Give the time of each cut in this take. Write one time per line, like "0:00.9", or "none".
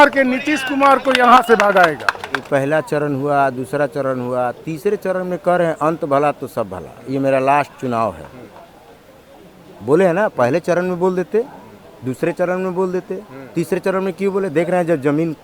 0:02.4